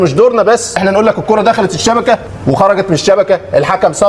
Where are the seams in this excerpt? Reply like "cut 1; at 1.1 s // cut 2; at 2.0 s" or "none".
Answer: cut 1; at 0.8 s // cut 2; at 2.3 s

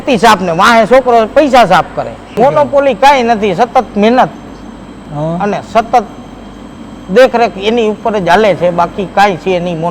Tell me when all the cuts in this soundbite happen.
cut 1; at 2.2 s

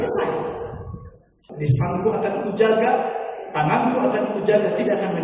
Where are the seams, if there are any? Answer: cut 1; at 1.3 s

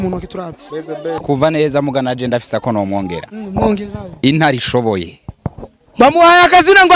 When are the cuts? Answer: cut 1; at 1.2 s

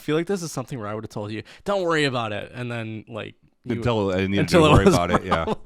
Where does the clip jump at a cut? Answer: none

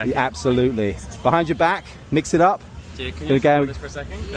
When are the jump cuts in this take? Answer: cut 1; at 1.9 s

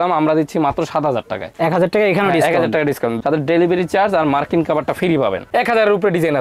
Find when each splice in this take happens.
cut 1; at 3.2 s // cut 2; at 5.5 s

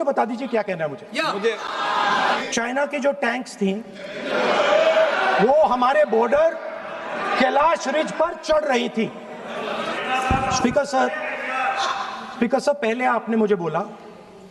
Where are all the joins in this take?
none

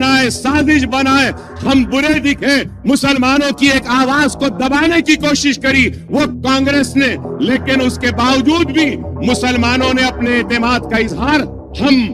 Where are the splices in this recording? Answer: cut 1; at 6.3 s

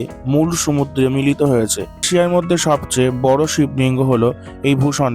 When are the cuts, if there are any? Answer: cut 1; at 2.1 s

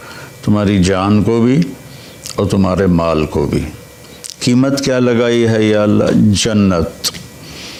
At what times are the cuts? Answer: none

